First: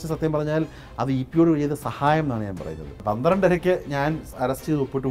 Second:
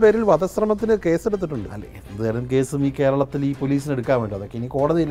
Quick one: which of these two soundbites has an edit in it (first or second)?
first